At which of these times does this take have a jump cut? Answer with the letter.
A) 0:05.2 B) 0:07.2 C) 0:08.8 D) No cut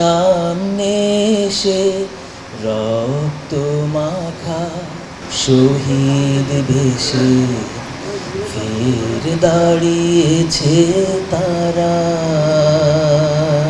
A